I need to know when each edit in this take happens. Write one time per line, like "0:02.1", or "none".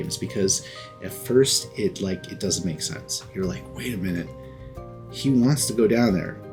none